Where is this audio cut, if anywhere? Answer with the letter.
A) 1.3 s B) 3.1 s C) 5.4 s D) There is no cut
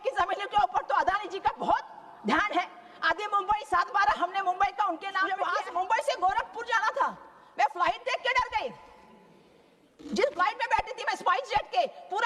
C